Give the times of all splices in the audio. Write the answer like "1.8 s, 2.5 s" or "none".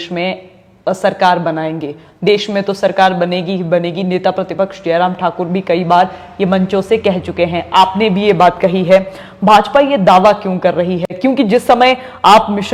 none